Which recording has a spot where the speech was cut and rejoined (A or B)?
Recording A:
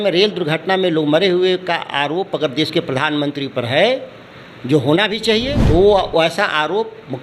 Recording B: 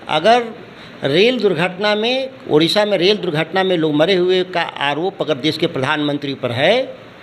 A